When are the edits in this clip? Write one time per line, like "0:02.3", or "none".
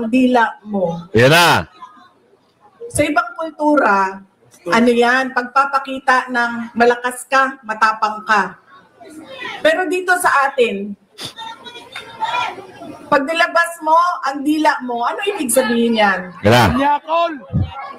none